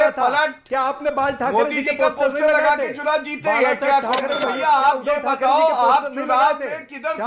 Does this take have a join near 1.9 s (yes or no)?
no